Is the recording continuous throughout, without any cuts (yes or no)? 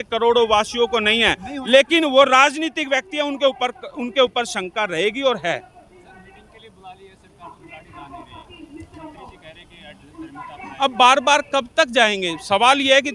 yes